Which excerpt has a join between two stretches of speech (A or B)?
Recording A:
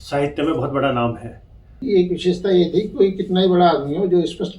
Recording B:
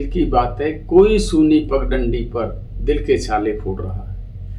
A